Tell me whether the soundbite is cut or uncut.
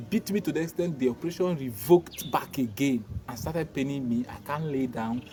uncut